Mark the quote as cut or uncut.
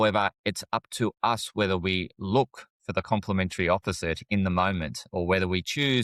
uncut